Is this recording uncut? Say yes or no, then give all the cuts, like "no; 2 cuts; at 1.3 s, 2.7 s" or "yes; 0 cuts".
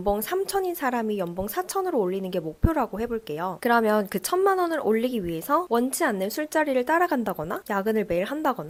yes; 0 cuts